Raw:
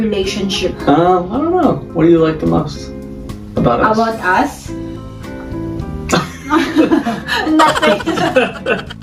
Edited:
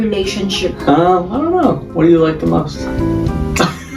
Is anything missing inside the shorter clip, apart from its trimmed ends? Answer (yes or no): yes